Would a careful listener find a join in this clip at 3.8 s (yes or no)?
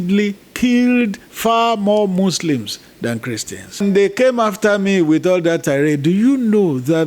yes